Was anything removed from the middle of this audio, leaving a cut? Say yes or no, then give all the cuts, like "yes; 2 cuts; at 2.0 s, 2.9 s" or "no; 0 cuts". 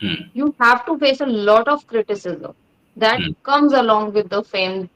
no; 0 cuts